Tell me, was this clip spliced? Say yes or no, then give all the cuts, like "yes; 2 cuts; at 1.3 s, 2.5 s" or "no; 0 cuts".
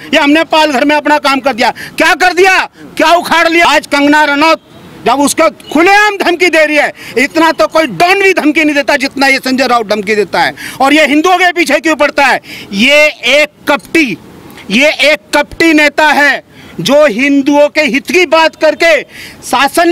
yes; 1 cut; at 3.6 s